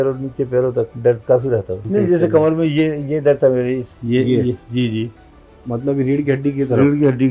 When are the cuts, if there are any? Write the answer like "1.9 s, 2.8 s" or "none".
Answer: 0.9 s, 1.8 s, 3.9 s